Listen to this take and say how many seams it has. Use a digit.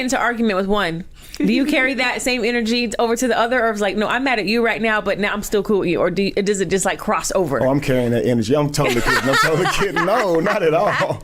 0